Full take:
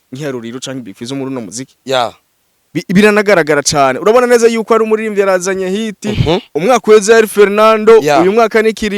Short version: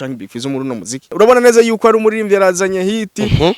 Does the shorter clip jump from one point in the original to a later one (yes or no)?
yes